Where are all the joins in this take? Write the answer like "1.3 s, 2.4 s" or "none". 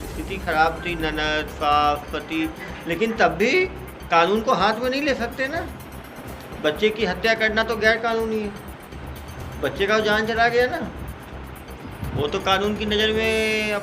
none